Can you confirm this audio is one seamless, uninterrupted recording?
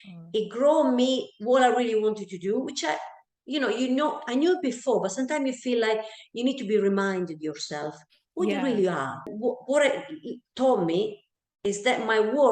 no; 1 cut; at 9.3 s

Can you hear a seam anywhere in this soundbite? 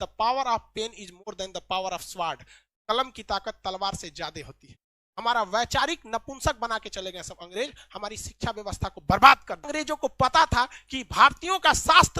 yes; 1 cut; at 9.7 s

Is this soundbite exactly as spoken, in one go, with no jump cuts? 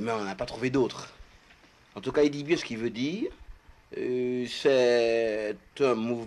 yes; 0 cuts

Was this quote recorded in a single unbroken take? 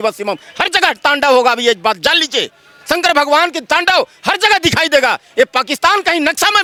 yes; 0 cuts

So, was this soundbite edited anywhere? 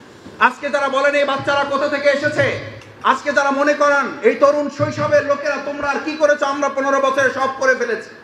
no; 0 cuts

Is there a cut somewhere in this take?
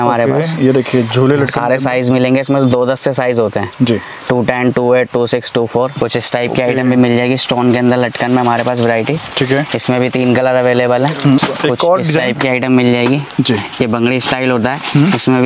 yes; 2 cuts; at 6.0 s, 11.4 s

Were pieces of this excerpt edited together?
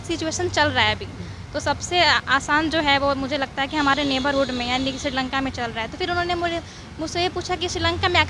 no; 0 cuts

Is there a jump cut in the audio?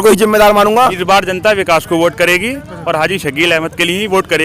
yes; 1 cut; at 1.0 s

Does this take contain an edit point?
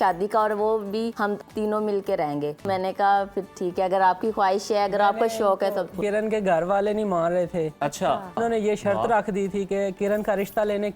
yes; 5 cuts; at 1.3 s, 2.6 s, 6.0 s, 8.4 s, 10.0 s

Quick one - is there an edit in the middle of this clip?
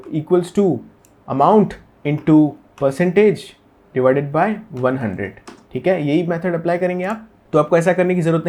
no; 0 cuts

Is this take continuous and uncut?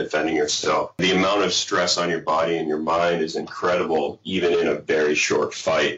no; 1 cut; at 1.0 s

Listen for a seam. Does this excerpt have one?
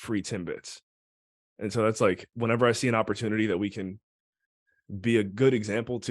yes; 1 cut; at 2.3 s

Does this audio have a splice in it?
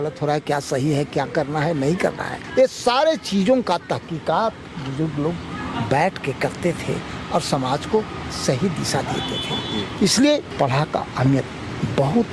no; 0 cuts

